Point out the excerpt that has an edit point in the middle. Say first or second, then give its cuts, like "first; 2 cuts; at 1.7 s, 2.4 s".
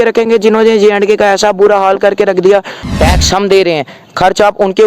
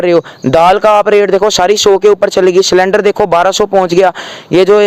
first; 1 cut; at 2.8 s